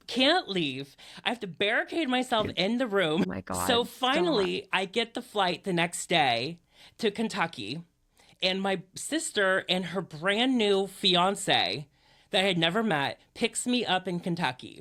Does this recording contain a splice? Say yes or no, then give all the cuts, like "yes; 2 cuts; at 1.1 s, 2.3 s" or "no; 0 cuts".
no; 0 cuts